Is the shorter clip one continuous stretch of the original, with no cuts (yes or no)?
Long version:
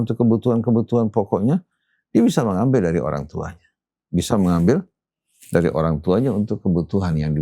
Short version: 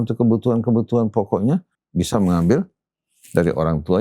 no